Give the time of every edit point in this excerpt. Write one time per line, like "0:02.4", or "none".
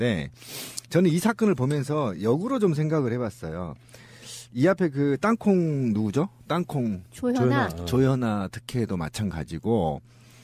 0:02.7